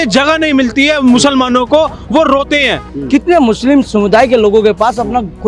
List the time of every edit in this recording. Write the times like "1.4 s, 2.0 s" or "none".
2.9 s